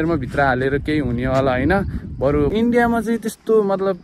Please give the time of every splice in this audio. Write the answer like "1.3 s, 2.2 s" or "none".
2.5 s